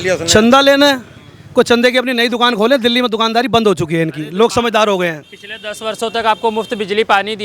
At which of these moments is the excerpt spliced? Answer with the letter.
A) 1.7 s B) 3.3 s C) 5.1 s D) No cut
D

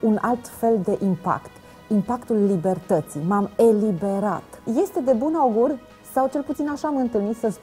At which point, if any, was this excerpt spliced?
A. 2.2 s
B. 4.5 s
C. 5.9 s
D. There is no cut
B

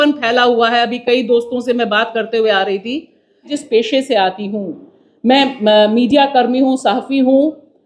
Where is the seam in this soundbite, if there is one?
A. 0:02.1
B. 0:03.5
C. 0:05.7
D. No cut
B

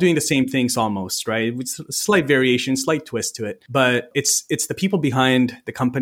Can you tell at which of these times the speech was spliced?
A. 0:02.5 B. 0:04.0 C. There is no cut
B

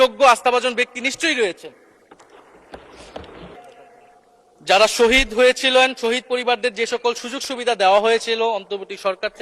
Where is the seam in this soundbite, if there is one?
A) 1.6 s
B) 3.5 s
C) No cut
B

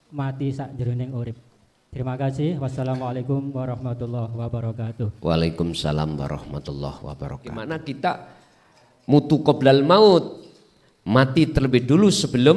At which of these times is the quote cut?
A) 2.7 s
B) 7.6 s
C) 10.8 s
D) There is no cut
B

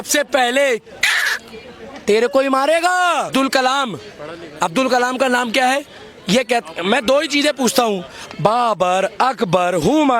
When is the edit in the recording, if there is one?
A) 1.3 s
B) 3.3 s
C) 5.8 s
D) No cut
B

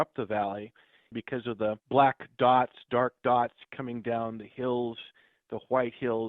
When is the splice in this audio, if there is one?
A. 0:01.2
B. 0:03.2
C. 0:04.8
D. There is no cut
A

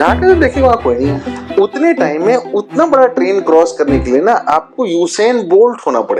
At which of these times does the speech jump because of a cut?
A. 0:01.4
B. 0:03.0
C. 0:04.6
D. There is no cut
D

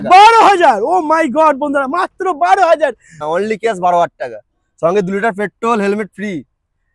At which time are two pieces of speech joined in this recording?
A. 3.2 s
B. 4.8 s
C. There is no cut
A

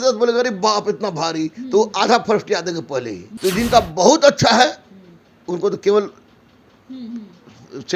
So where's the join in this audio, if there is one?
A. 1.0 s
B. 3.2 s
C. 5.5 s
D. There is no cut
B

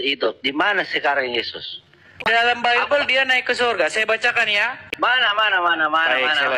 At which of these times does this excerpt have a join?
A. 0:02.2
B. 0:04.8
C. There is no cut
A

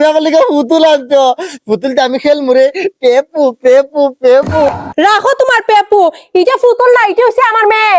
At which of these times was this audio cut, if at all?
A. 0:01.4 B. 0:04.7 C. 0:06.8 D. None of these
B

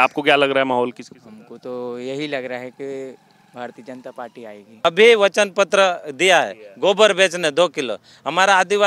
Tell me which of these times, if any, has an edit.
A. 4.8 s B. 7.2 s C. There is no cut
A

